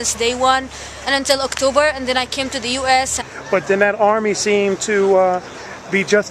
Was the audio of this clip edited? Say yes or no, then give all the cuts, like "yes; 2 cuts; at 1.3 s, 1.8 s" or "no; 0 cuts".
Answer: no; 0 cuts